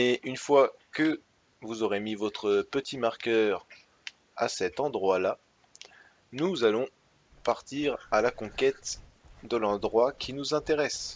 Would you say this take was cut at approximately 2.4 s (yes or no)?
yes